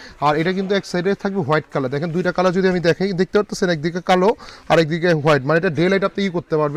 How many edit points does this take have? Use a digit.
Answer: 0